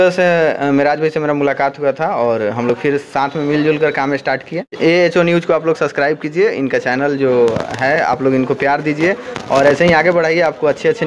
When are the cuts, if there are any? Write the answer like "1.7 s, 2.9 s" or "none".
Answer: 4.7 s